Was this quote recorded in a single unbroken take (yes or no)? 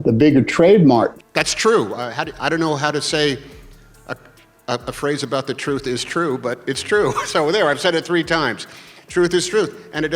no